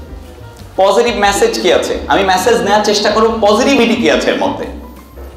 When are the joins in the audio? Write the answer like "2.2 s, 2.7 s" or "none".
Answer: none